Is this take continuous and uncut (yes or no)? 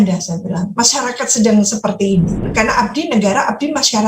no